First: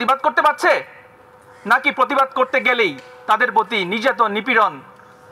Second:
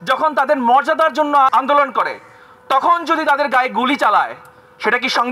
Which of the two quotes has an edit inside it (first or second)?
second